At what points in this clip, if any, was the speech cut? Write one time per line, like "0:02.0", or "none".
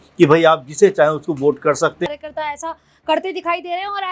0:02.1

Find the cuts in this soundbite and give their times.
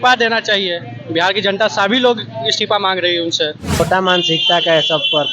0:03.8

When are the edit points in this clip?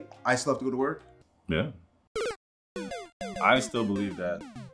0:03.4

